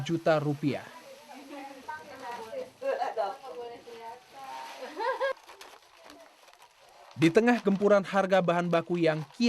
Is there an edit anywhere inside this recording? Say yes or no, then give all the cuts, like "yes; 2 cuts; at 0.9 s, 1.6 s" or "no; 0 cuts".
yes; 1 cut; at 1.8 s